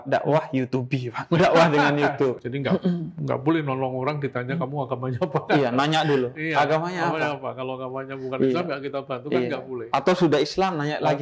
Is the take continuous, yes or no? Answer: no